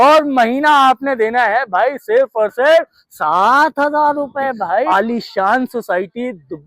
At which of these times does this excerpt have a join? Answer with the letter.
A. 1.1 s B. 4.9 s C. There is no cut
B